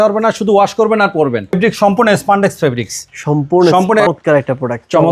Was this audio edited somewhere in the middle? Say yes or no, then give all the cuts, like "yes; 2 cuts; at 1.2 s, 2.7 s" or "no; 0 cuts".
yes; 2 cuts; at 1.5 s, 4.1 s